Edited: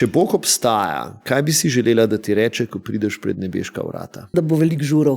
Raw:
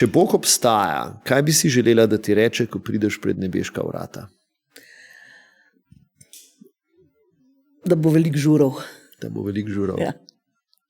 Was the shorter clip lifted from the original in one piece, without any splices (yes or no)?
no